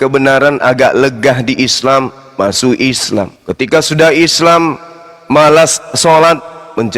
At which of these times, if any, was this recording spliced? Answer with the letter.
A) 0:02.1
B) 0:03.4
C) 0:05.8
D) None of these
B